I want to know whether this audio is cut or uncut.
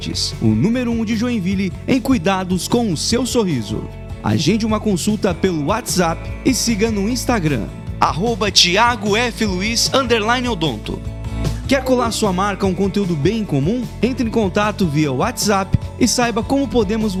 uncut